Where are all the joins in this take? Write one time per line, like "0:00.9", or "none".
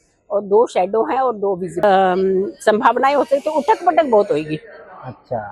0:01.8